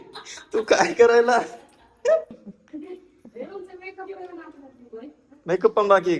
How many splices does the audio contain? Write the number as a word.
one